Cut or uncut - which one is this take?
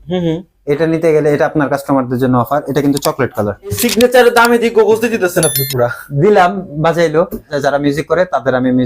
cut